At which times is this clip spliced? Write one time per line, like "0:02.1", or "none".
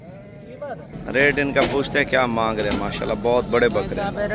0:00.9